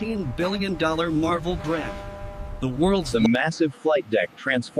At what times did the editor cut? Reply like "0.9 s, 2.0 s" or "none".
3.1 s